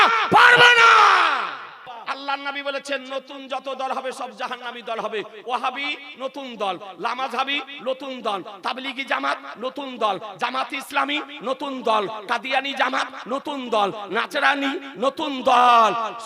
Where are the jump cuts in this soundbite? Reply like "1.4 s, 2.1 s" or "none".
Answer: 2.0 s